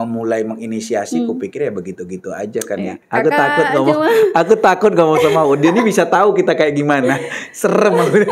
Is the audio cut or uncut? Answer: cut